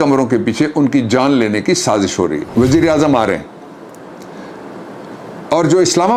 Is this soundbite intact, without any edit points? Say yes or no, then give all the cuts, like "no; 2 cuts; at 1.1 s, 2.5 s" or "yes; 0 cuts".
no; 1 cut; at 2.5 s